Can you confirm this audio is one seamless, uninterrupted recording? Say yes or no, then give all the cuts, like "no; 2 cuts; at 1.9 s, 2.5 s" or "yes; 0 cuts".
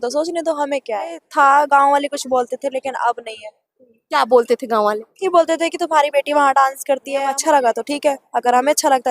no; 2 cuts; at 1.2 s, 7.3 s